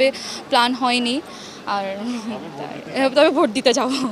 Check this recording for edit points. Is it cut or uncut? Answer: uncut